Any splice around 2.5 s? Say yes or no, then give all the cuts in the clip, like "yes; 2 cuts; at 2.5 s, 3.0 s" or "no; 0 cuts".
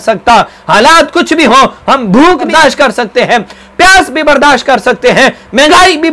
yes; 1 cut; at 2.5 s